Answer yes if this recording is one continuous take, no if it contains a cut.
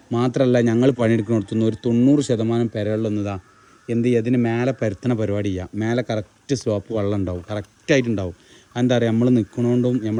yes